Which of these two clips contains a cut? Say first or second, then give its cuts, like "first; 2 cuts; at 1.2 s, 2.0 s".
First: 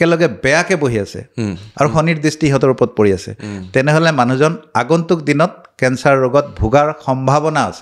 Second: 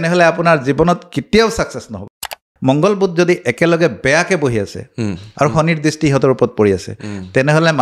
second; 1 cut; at 2.3 s